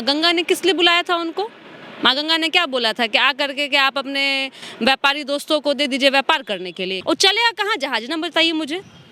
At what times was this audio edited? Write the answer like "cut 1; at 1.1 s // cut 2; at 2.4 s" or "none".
cut 1; at 7.0 s